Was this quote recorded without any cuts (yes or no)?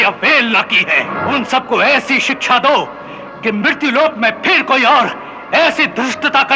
no